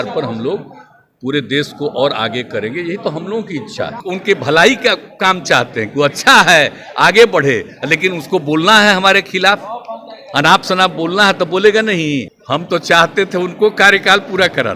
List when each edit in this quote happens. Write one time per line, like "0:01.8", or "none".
0:04.0
0:12.3